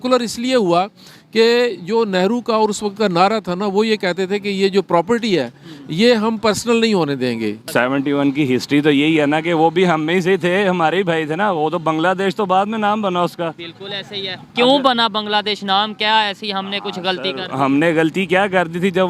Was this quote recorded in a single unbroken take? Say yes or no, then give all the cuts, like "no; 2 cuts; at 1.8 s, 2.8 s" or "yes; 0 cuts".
no; 1 cut; at 7.6 s